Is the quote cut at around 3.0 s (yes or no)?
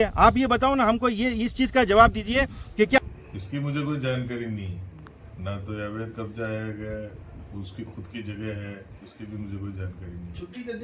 yes